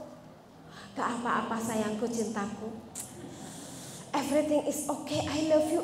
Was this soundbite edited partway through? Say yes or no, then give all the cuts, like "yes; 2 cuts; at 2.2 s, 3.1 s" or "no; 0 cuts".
no; 0 cuts